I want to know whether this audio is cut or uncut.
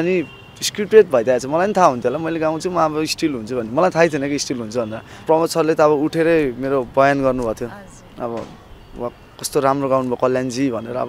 cut